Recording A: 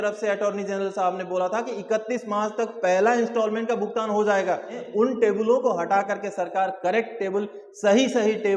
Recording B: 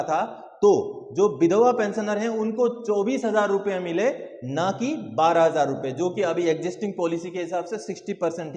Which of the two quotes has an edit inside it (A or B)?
A